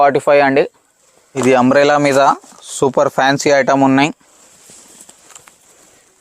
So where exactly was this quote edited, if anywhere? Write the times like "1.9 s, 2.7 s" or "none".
1.2 s